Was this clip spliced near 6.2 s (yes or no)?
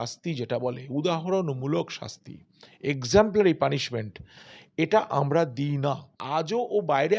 yes